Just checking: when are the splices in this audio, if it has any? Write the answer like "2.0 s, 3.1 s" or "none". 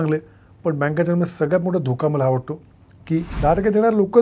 3.3 s